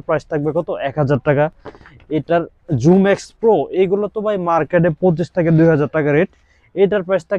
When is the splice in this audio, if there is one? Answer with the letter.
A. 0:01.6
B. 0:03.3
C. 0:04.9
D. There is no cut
D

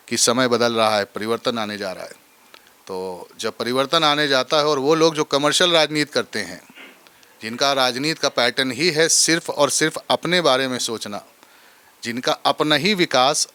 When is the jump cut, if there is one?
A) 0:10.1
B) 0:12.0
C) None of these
C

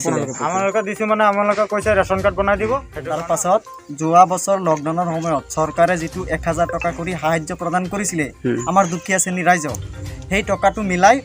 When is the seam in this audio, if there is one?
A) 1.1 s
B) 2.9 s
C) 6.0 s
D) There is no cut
B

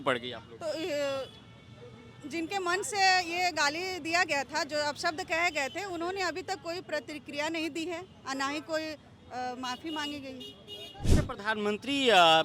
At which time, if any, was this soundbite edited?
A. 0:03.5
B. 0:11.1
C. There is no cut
B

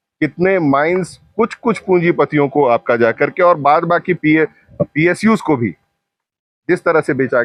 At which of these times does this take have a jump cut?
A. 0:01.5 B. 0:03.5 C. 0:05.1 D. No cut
D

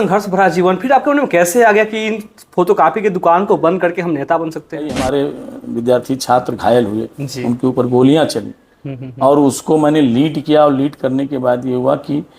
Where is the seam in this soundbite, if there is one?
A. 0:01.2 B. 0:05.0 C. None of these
B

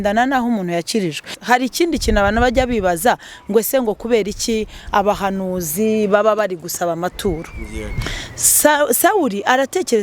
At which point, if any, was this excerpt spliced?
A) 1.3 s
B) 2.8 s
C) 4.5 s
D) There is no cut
A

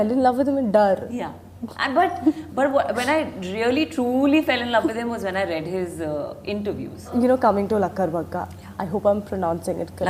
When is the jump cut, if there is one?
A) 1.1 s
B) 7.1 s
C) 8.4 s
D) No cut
B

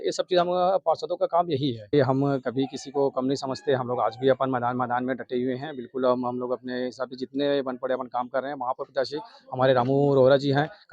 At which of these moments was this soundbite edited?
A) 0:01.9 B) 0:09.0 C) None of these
A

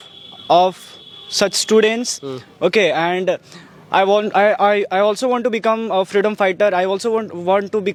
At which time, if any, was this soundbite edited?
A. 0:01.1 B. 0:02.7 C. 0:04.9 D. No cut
D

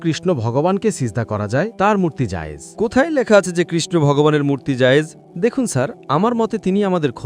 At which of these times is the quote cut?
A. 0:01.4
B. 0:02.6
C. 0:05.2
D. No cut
C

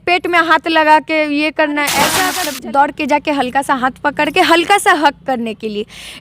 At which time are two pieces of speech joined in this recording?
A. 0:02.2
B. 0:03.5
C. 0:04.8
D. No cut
A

